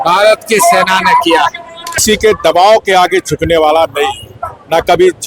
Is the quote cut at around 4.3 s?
no; 1 cut; at 2.0 s

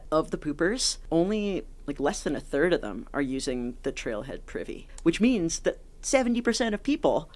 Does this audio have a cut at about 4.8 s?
yes; 2 cuts; at 0.9 s, 4.8 s

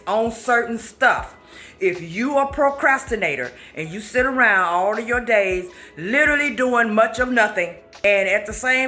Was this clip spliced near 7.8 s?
yes; 1 cut; at 7.8 s

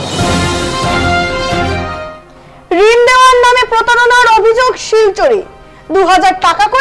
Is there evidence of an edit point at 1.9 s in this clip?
yes; 1 cut; at 1.9 s

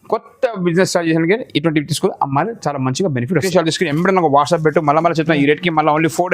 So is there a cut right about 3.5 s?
yes; 1 cut; at 3.5 s

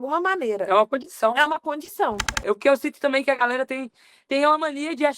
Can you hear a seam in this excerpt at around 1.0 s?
no; 1 cut; at 2.3 s

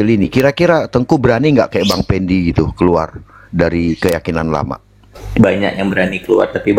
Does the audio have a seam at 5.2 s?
yes; 1 cut; at 5.2 s

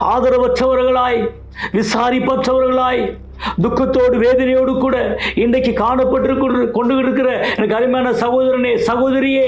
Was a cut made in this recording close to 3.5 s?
no; 0 cuts

